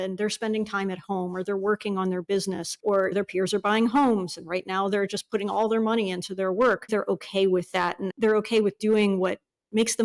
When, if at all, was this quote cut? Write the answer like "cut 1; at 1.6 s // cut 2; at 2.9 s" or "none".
cut 1; at 6.9 s // cut 2; at 8.1 s